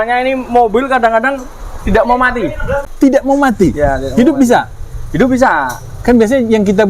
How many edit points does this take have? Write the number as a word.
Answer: one